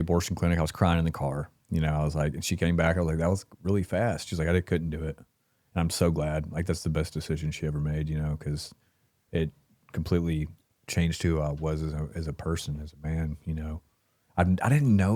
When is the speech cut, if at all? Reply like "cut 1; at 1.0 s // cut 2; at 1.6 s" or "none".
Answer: none

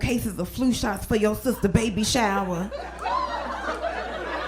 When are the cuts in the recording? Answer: none

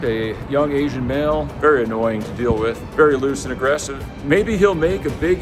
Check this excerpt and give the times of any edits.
cut 1; at 1.5 s // cut 2; at 2.8 s

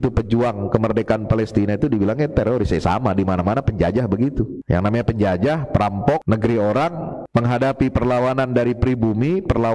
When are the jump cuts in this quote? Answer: cut 1; at 4.6 s // cut 2; at 6.2 s // cut 3; at 7.2 s

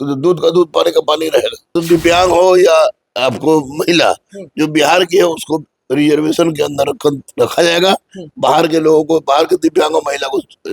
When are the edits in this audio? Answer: cut 1; at 1.8 s

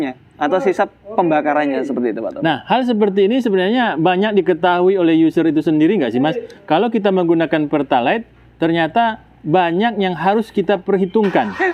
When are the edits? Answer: none

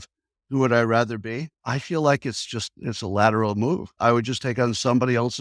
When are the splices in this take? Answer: cut 1; at 1.5 s // cut 2; at 4.0 s

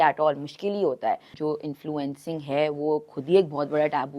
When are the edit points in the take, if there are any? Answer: cut 1; at 1.3 s

